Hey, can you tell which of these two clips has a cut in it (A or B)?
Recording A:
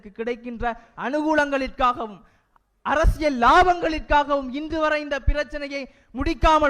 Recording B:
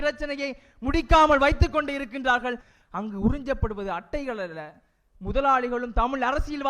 B